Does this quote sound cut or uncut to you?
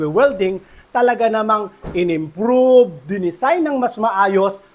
uncut